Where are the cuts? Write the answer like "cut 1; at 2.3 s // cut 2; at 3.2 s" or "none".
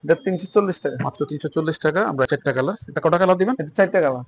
cut 1; at 2.3 s